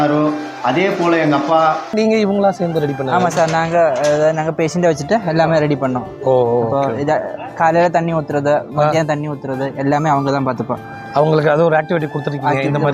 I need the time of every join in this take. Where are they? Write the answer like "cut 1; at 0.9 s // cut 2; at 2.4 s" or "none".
cut 1; at 1.9 s